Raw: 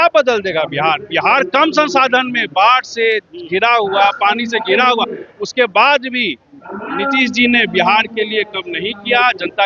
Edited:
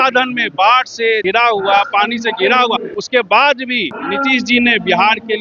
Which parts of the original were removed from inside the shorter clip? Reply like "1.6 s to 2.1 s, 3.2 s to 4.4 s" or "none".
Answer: 3.2 s to 3.5 s, 5.2 s to 5.4 s, 6.4 s to 6.8 s